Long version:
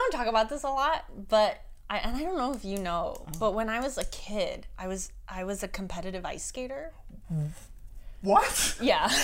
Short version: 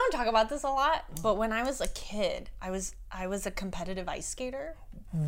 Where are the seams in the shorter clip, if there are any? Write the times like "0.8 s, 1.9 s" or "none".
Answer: 1.1 s